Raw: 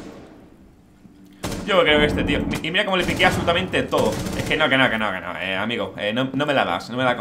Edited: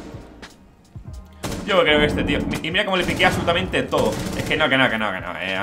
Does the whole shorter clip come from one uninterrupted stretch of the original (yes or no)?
yes